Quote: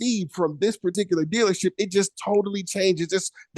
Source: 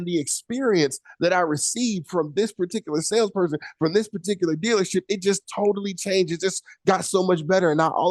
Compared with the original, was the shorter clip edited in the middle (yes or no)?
yes